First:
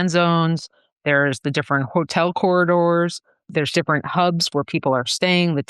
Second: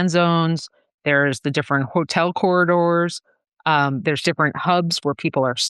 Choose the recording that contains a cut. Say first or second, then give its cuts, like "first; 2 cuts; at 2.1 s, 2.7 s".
first; 1 cut; at 3.5 s